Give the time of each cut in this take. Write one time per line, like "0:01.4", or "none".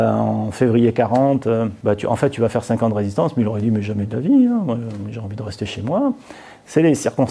none